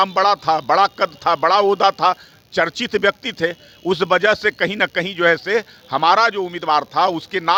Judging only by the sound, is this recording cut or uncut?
uncut